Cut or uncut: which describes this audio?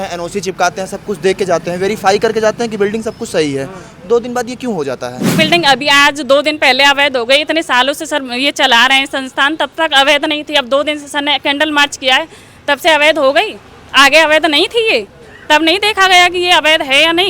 cut